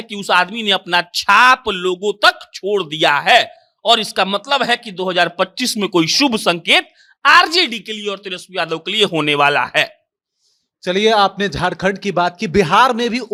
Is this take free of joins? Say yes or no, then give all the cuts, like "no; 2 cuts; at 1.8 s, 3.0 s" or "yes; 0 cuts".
yes; 0 cuts